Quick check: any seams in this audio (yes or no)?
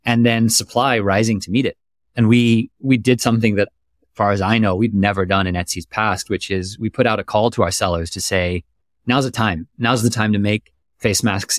no